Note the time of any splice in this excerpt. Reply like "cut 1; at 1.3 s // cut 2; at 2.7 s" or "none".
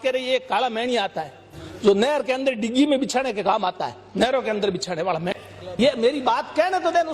cut 1; at 5.3 s